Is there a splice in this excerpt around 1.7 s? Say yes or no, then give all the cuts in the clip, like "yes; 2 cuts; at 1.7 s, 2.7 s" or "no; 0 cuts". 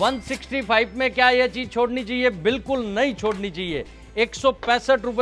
no; 0 cuts